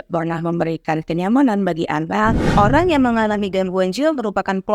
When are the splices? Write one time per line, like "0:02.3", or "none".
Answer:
0:02.4